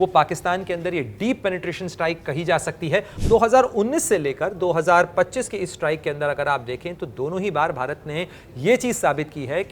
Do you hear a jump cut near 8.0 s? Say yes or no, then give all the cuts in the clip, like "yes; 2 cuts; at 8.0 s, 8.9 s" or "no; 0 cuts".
no; 1 cut; at 3.1 s